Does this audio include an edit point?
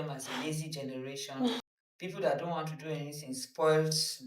yes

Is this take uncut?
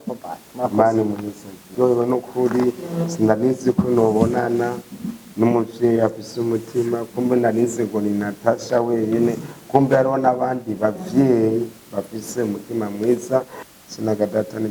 no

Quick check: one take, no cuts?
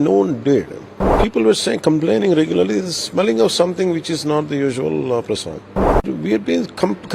no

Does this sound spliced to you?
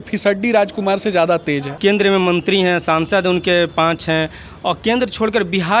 yes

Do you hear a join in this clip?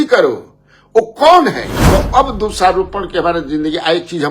yes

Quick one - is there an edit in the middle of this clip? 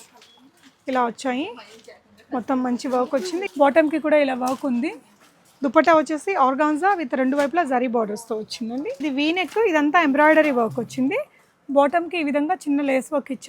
yes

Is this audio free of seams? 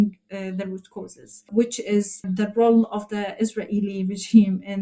no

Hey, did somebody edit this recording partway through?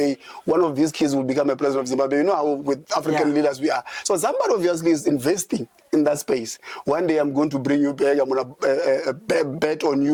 no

